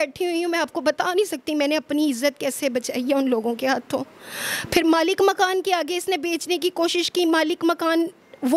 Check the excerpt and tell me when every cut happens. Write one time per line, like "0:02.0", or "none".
none